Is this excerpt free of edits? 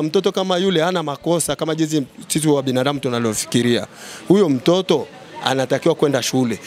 yes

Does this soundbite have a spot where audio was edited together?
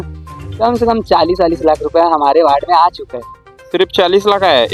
no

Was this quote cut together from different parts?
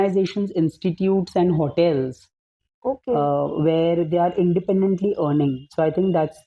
no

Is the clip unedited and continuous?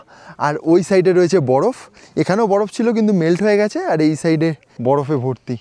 no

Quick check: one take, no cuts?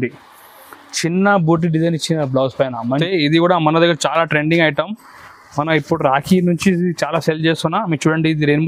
no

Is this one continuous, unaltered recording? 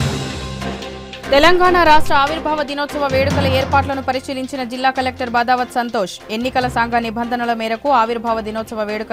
yes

